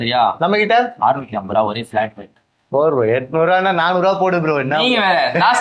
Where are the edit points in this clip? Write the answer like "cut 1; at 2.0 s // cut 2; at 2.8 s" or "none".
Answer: none